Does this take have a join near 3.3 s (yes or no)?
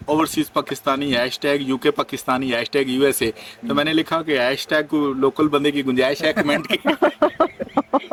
no